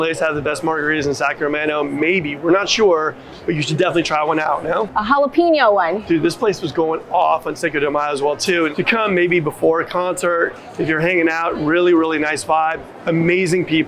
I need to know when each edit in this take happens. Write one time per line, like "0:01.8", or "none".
0:04.9
0:06.0
0:08.7